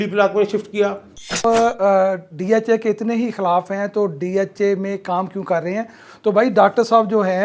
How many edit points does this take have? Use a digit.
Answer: 1